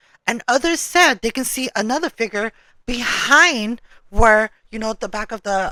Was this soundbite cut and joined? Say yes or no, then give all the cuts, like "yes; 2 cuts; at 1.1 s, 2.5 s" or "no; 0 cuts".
no; 0 cuts